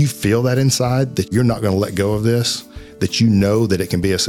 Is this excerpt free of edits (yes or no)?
no